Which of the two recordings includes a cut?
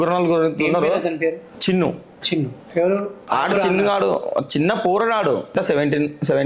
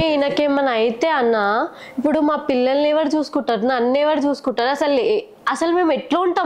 first; 2 cuts; at 1.5 s, 5.5 s

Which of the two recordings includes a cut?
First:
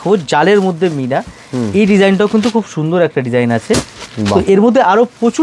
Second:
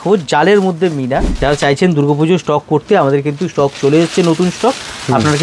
second; 1 cut; at 1.3 s

